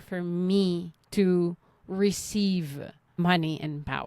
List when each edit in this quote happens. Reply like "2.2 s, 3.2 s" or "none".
0.9 s, 3.0 s